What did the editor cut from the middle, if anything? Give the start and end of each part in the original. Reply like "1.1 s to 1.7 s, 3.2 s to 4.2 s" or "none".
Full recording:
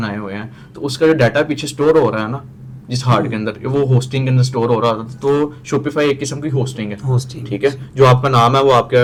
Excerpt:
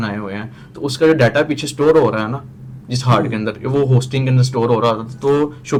none